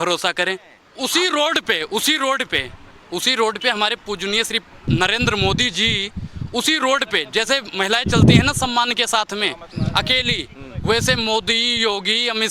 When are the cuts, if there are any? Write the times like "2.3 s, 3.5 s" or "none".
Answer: 1.1 s